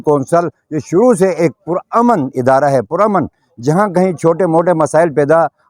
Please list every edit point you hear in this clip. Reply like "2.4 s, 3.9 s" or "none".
none